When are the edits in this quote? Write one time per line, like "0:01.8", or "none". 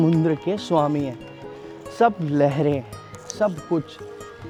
none